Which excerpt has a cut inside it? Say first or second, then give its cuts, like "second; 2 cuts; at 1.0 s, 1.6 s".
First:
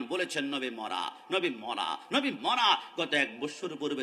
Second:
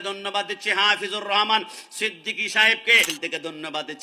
second; 1 cut; at 3.1 s